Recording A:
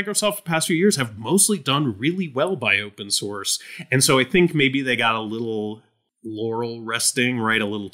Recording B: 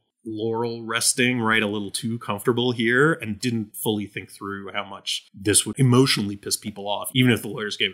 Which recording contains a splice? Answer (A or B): B